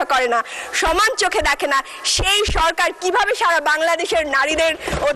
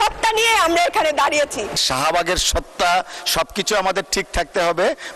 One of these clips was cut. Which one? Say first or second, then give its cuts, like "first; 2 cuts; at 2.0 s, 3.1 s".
second; 1 cut; at 1.8 s